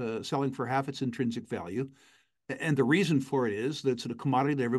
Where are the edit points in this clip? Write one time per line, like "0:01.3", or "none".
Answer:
none